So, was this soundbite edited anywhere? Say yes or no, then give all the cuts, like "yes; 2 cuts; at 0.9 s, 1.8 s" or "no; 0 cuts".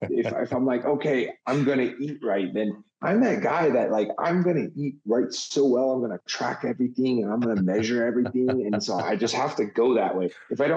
no; 0 cuts